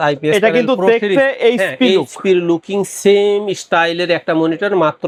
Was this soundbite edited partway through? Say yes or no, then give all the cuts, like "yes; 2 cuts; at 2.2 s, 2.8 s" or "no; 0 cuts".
no; 0 cuts